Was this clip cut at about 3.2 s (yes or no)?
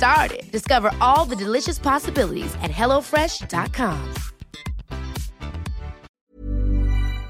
no